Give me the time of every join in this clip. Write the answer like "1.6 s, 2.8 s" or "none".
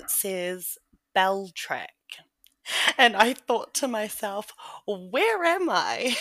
2.2 s